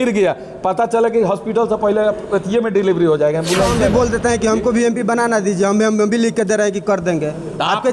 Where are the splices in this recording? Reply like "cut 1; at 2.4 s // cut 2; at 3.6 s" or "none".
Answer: cut 1; at 3.8 s